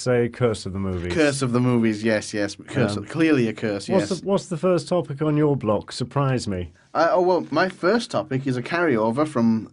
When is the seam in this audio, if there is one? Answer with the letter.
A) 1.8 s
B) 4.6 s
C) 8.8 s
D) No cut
A